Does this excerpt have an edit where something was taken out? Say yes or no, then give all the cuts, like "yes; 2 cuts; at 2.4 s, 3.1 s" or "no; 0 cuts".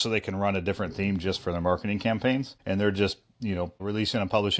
yes; 1 cut; at 2.5 s